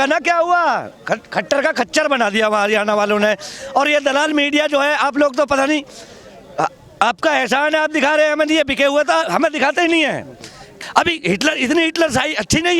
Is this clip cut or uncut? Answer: uncut